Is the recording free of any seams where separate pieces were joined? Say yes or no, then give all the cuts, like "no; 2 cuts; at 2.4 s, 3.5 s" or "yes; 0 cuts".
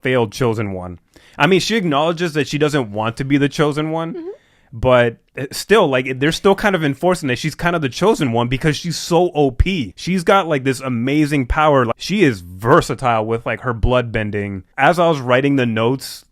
no; 2 cuts; at 11.9 s, 14.6 s